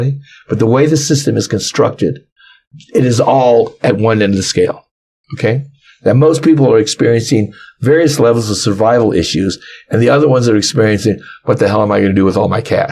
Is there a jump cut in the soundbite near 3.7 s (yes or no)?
no